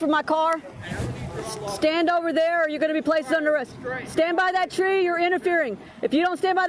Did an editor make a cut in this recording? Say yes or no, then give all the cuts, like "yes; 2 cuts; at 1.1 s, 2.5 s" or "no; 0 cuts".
no; 0 cuts